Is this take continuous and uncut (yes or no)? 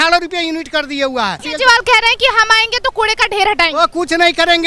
no